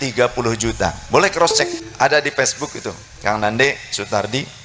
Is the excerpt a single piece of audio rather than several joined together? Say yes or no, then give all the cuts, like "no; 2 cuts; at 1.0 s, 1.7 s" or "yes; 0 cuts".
no; 1 cut; at 1.8 s